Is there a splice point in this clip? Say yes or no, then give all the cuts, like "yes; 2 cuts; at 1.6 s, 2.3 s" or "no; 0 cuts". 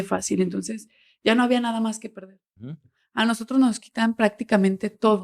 yes; 1 cut; at 2.7 s